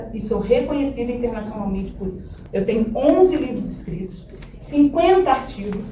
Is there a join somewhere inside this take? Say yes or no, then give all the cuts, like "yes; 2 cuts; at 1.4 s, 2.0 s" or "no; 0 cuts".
yes; 1 cut; at 2.3 s